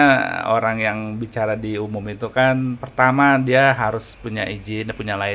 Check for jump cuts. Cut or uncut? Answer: uncut